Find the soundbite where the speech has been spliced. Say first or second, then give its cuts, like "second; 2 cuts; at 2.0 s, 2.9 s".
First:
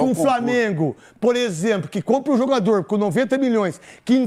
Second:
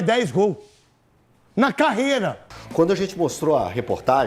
second; 1 cut; at 2.6 s